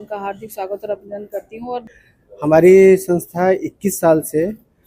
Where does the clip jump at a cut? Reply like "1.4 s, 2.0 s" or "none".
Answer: 1.9 s